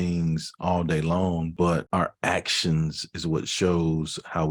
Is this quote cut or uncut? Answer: cut